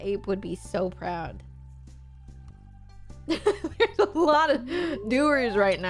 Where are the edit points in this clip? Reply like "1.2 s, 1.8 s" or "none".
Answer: none